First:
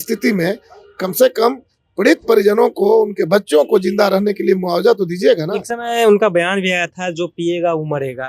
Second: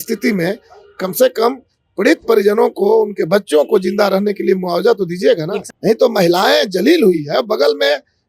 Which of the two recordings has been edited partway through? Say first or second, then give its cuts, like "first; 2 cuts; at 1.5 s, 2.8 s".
second; 1 cut; at 5.6 s